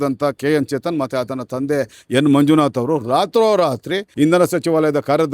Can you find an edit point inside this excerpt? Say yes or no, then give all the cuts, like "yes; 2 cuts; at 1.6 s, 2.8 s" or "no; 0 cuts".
yes; 1 cut; at 4.1 s